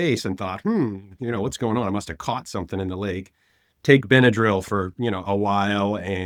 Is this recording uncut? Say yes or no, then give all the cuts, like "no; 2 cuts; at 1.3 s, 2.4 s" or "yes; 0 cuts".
yes; 0 cuts